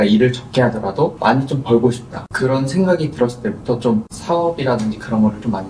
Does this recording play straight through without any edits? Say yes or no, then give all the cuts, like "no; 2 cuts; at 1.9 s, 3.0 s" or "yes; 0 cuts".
no; 1 cut; at 1.2 s